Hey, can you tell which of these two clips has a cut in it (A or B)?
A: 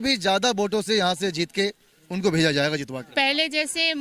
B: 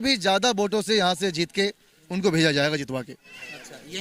A